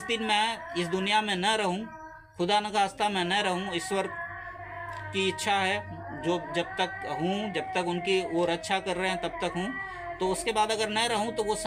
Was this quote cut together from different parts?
no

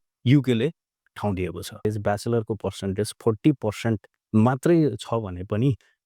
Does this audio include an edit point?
yes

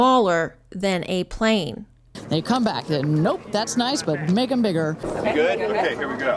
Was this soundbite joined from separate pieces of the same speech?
no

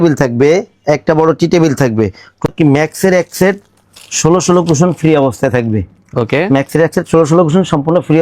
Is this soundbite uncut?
no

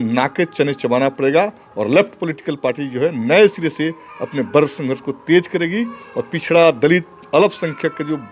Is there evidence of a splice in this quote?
no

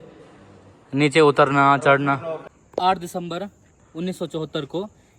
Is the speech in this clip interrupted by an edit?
yes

